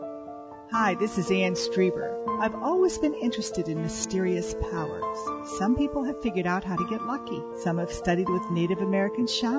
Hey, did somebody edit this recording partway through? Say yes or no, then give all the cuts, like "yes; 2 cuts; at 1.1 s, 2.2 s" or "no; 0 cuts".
no; 0 cuts